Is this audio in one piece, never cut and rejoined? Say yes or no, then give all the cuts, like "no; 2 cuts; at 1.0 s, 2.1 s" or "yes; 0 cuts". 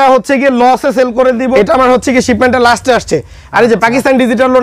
no; 1 cut; at 1.5 s